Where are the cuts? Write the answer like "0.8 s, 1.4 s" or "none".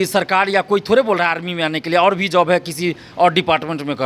none

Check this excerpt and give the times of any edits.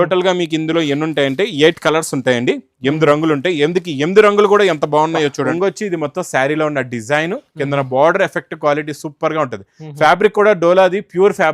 5.5 s

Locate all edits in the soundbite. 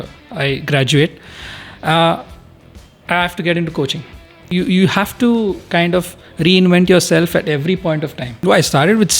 4.4 s, 8.3 s

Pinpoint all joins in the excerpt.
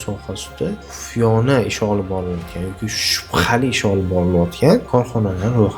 0.9 s, 4.9 s

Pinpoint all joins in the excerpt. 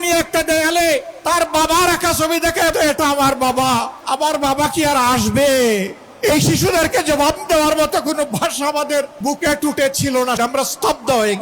1.1 s, 2.7 s, 3.9 s, 6.0 s, 9.1 s, 10.4 s

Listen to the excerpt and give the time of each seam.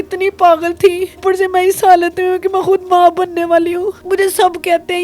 1.2 s, 4.0 s

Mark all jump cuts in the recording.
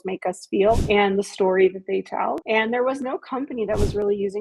0.8 s, 2.4 s

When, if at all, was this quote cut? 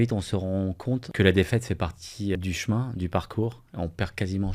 1.1 s, 2.4 s

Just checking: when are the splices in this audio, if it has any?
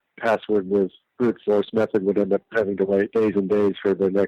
3.1 s

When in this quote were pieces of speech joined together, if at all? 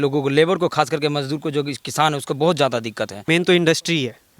3.2 s

